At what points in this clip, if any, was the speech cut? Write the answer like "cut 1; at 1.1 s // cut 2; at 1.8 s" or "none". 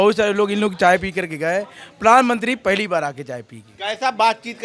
none